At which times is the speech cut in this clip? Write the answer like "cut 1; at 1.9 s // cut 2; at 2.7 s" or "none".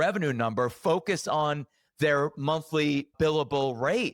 cut 1; at 3.1 s